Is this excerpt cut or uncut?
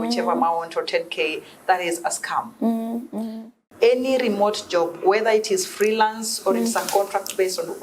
cut